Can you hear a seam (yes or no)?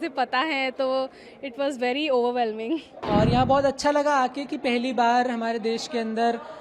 yes